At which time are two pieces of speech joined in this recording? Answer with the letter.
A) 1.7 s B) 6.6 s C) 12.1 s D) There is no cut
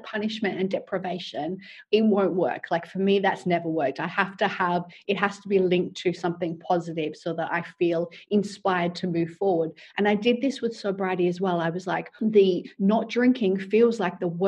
C